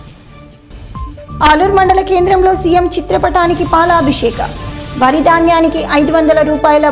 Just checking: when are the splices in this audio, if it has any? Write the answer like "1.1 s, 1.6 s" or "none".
none